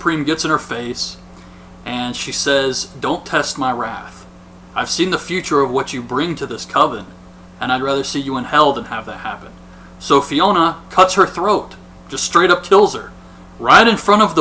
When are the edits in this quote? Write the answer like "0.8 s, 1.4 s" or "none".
8.6 s